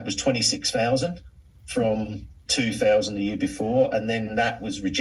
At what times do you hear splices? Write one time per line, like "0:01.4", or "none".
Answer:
none

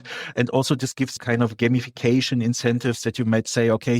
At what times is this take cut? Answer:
0:01.2

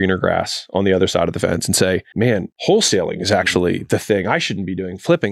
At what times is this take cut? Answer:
0:02.5

